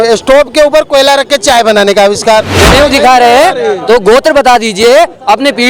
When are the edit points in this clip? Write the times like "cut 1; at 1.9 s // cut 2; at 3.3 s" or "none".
cut 1; at 2.6 s

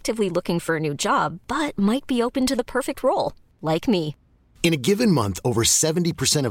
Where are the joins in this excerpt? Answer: none

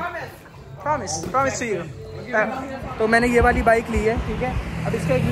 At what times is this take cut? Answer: cut 1; at 2.8 s

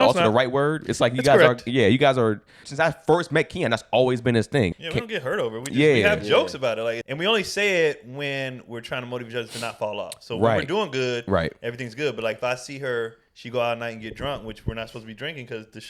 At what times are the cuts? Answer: cut 1; at 2.6 s // cut 2; at 4.7 s // cut 3; at 7.0 s

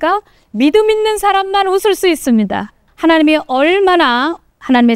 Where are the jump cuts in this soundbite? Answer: cut 1; at 2.8 s

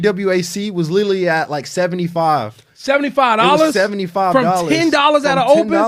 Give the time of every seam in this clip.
none

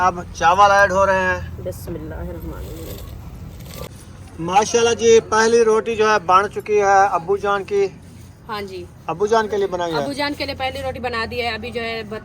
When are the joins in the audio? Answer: cut 1; at 3.9 s

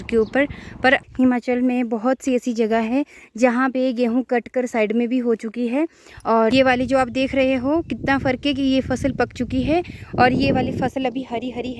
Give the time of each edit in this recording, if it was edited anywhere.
cut 1; at 1.0 s // cut 2; at 6.5 s

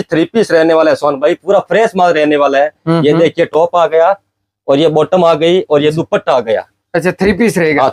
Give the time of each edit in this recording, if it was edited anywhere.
none

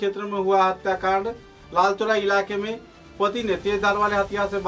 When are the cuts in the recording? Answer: none

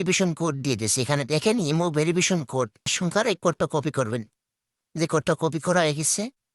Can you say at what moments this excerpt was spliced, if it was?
cut 1; at 2.9 s

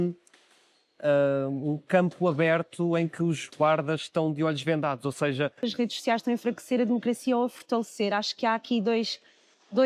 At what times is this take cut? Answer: cut 1; at 5.6 s

